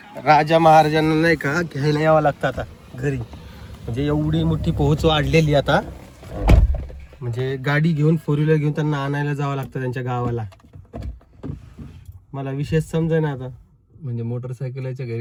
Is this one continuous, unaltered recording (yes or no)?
yes